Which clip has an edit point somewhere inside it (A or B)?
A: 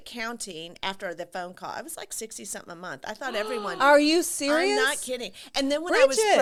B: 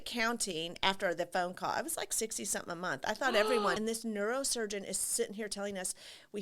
B